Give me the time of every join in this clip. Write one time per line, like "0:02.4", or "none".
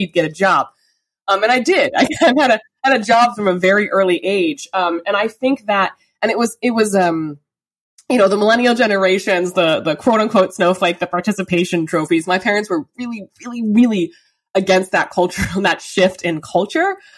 none